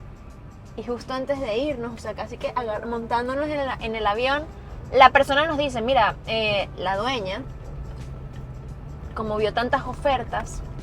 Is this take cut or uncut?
uncut